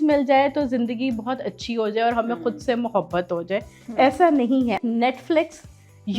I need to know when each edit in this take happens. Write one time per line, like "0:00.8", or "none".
0:04.8